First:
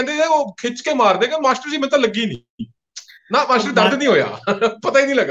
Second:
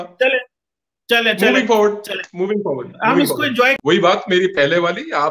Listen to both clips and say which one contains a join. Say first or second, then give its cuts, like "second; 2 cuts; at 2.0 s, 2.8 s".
second; 1 cut; at 3.8 s